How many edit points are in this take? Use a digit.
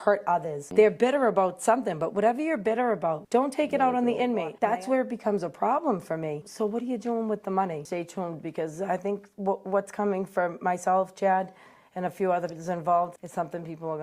4